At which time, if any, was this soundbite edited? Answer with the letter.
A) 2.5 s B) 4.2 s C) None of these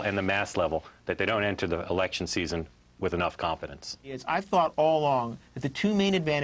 B